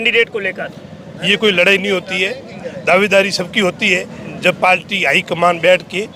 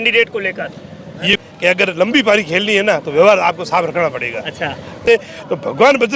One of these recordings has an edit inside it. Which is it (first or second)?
second